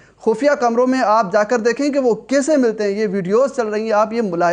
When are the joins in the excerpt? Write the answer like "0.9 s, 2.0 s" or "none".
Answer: none